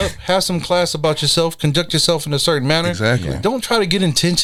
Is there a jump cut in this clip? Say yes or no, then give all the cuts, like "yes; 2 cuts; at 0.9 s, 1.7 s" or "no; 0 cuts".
no; 0 cuts